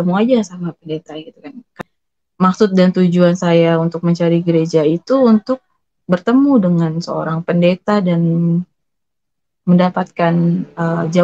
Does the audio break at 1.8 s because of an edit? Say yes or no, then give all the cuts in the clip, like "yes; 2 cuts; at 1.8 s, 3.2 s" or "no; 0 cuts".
yes; 1 cut; at 1.8 s